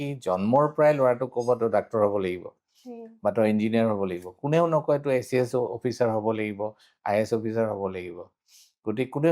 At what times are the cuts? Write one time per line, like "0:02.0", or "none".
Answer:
none